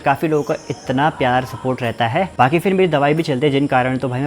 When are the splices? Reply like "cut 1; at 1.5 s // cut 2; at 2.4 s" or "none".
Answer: cut 1; at 2.3 s

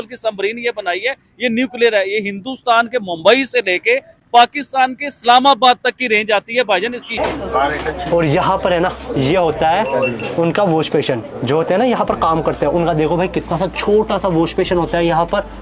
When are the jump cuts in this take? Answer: cut 1; at 7.1 s

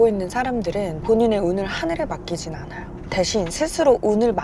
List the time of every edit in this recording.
cut 1; at 1.0 s

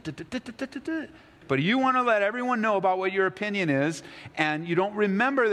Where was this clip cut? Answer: cut 1; at 1.4 s

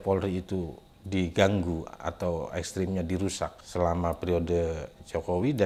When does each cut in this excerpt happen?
none

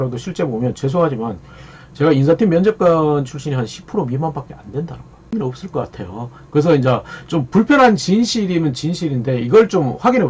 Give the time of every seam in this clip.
cut 1; at 5.3 s

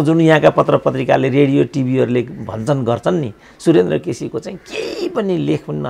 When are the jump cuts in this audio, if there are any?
none

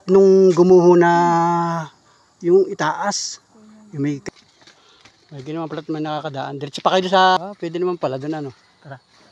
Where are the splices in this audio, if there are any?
cut 1; at 4.2 s // cut 2; at 7.4 s

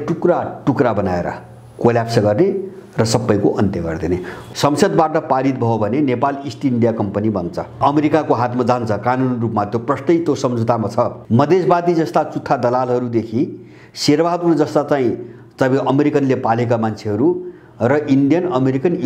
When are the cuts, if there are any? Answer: cut 1; at 4.3 s // cut 2; at 7.8 s // cut 3; at 11.2 s

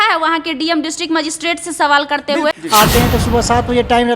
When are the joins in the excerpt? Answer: cut 1; at 2.6 s

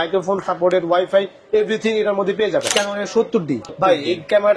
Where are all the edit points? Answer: cut 1; at 2.7 s

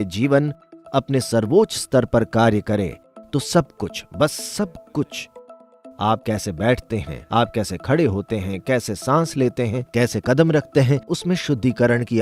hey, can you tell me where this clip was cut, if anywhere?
none

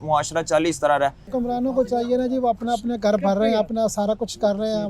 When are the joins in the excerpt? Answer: cut 1; at 1.2 s

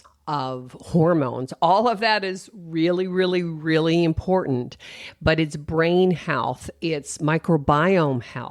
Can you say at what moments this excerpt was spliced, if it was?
none

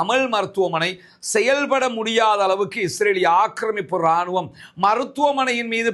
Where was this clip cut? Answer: none

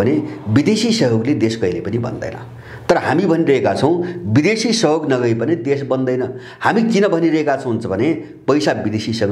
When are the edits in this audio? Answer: none

